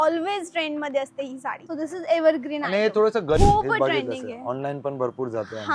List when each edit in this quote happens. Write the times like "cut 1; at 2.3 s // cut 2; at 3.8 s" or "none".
cut 1; at 1.6 s // cut 2; at 3.4 s